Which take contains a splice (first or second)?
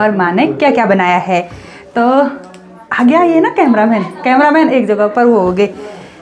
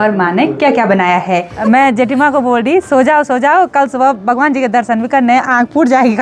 second